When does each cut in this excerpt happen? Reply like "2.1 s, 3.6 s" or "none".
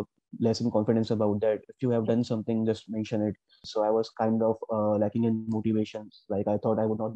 3.6 s